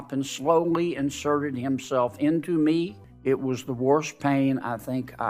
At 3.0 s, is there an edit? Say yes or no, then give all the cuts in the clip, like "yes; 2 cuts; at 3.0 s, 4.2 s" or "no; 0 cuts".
yes; 1 cut; at 3.0 s